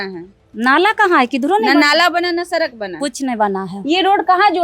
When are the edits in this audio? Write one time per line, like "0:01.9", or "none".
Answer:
none